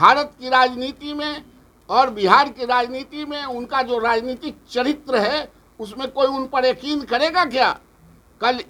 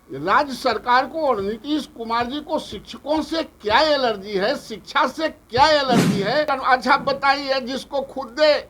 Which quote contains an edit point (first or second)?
second